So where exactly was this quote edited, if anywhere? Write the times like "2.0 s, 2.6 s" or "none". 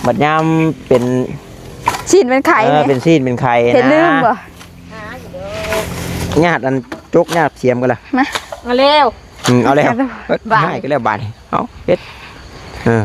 6.3 s